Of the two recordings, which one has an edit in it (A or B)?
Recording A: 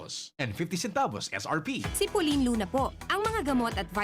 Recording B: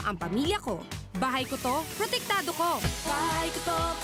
A